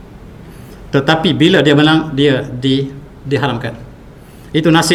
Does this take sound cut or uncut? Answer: uncut